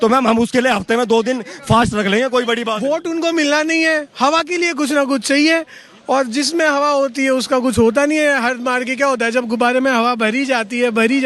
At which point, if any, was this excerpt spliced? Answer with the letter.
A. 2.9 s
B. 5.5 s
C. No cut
A